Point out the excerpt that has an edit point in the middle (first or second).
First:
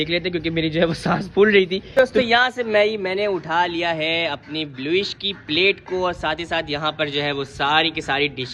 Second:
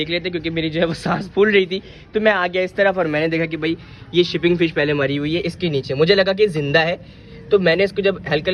first